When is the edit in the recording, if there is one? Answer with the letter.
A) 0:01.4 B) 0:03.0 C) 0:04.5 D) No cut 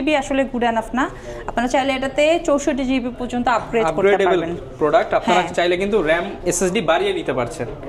D